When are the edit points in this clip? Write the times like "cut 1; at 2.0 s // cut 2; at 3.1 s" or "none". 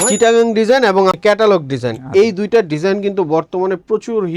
cut 1; at 1.1 s